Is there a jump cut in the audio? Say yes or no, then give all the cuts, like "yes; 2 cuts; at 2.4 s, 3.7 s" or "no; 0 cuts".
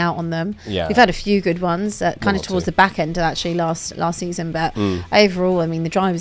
no; 0 cuts